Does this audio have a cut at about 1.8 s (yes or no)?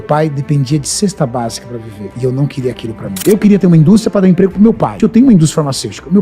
no